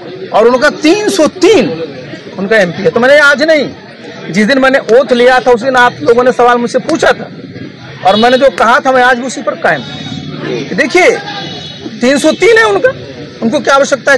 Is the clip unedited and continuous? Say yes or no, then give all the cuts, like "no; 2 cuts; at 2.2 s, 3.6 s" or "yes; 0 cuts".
yes; 0 cuts